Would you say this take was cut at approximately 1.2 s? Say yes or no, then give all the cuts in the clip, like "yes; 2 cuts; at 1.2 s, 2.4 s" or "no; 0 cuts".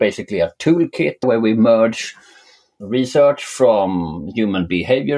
yes; 1 cut; at 1.2 s